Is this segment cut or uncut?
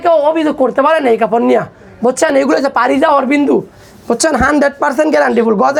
uncut